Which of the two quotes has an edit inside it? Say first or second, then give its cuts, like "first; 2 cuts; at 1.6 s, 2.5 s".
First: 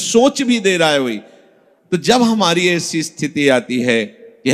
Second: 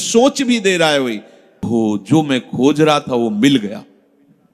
second; 1 cut; at 1.7 s